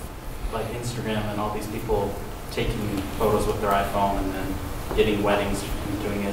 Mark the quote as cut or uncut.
uncut